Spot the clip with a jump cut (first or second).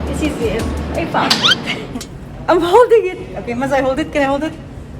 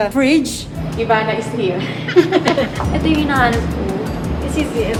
first